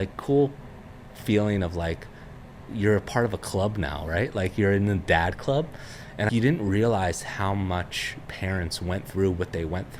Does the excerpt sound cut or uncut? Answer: cut